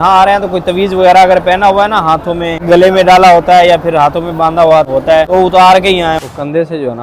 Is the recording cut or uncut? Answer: cut